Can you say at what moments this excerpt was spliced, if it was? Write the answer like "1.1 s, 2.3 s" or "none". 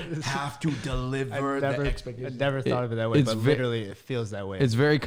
none